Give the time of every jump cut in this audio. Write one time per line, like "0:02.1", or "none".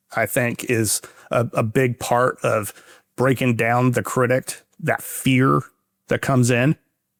none